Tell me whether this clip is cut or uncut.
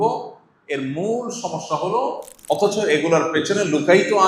cut